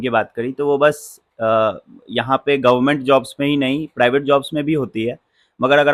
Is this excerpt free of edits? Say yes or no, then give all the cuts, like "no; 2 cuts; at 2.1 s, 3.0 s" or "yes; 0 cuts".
yes; 0 cuts